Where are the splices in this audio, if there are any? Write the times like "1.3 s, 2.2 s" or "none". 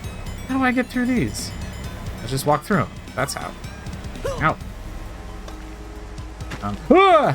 3.9 s